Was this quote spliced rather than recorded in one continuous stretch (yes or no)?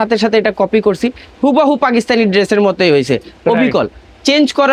no